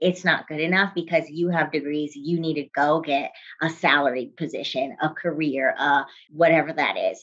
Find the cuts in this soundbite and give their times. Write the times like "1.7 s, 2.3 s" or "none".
6.2 s